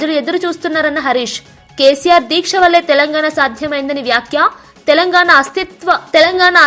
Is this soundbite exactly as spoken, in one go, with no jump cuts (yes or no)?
yes